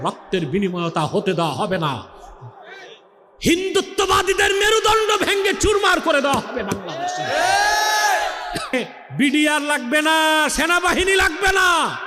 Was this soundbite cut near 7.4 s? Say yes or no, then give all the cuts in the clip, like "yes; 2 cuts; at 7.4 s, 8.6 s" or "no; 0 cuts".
no; 1 cut; at 8.7 s